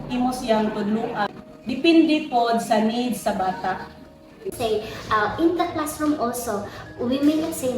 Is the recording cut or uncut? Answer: cut